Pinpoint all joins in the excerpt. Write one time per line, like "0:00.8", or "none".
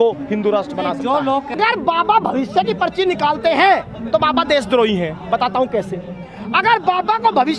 0:01.5